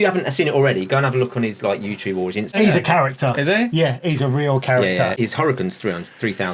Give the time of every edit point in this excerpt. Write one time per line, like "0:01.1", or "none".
0:02.5
0:05.1

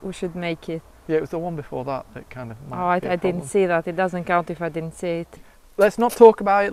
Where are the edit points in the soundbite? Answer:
0:05.5

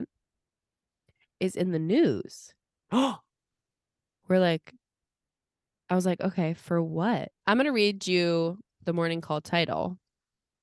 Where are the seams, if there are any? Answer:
0:07.3

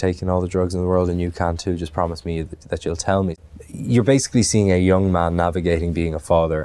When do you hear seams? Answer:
0:03.4

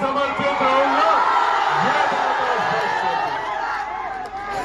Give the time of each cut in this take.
none

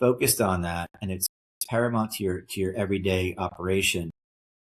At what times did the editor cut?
none

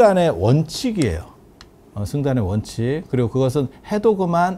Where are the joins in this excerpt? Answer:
none

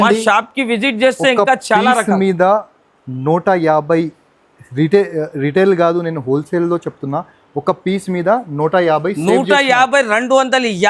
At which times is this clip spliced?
none

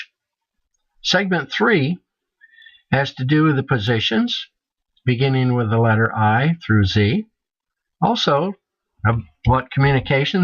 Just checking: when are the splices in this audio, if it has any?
0:01.7

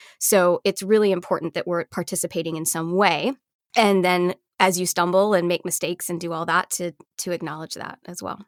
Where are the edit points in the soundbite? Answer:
none

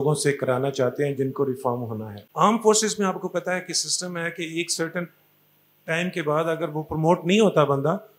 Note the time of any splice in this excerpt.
0:02.2

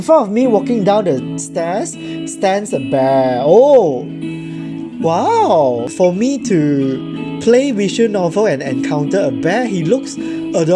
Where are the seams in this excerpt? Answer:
none

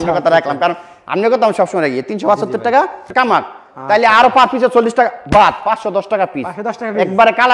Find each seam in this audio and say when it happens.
0:03.1

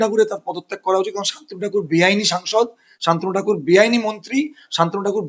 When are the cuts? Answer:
none

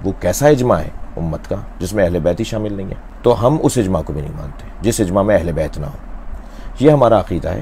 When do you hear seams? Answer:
none

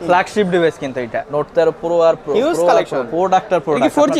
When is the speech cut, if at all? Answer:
0:01.2

